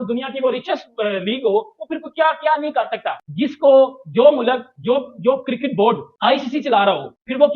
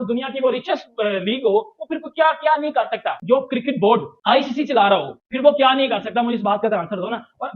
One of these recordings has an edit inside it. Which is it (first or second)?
second